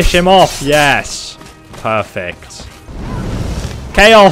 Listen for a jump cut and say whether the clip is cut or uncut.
cut